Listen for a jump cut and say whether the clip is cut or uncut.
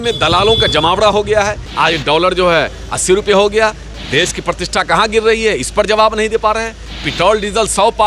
cut